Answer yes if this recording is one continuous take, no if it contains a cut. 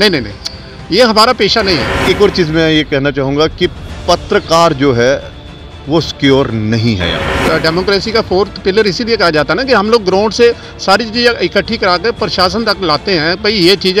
no